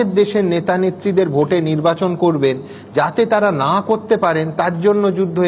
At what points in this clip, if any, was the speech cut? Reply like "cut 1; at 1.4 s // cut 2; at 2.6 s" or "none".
none